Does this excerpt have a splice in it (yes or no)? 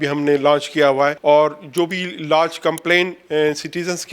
yes